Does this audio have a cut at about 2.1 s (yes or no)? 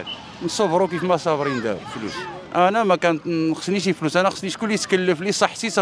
yes